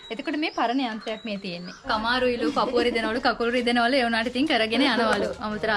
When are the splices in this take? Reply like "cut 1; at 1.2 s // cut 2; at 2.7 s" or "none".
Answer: cut 1; at 1.9 s